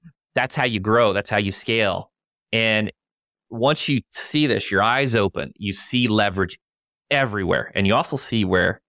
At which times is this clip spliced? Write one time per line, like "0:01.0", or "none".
none